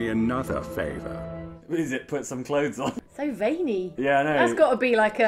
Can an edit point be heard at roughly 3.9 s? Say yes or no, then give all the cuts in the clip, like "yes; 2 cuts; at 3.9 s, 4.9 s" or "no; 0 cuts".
yes; 2 cuts; at 2.9 s, 3.9 s